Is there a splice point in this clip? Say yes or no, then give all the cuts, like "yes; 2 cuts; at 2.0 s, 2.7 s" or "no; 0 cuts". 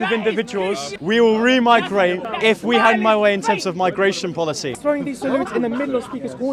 yes; 3 cuts; at 0.9 s, 2.3 s, 4.7 s